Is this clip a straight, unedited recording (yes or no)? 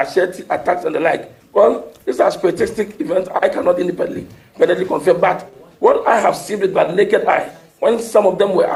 yes